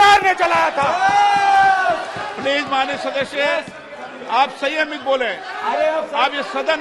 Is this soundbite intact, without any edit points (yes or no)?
yes